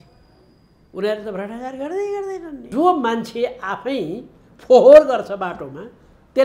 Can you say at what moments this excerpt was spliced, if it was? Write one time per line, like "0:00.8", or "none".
0:02.7